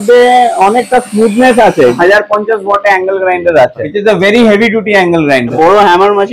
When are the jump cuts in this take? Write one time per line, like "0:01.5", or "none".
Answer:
0:02.0
0:03.9
0:05.5